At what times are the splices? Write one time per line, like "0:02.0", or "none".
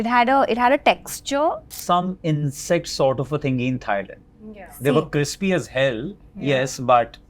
0:01.7